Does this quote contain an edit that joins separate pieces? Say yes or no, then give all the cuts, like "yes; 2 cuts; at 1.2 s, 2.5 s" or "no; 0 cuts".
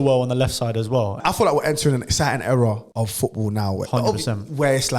yes; 2 cuts; at 1.2 s, 2.9 s